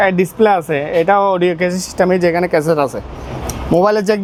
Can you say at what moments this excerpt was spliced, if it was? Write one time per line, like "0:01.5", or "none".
none